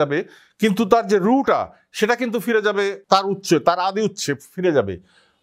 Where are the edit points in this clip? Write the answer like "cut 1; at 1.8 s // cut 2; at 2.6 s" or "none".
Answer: cut 1; at 3.0 s